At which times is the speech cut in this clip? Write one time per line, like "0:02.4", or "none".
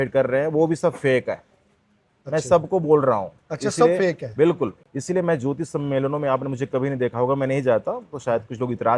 none